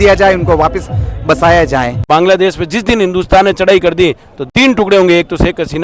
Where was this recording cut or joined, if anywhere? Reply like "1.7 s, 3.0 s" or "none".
2.1 s, 4.3 s